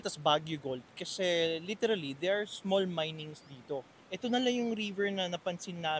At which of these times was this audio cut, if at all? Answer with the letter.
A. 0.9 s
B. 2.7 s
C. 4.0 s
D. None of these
C